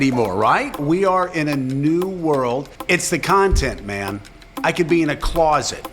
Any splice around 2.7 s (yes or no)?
yes